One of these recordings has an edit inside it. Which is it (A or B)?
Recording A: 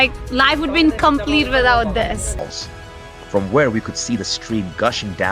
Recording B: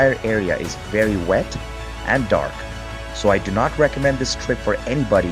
A